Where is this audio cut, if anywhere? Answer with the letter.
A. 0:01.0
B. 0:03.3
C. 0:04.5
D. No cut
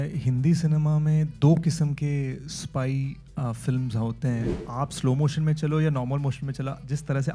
C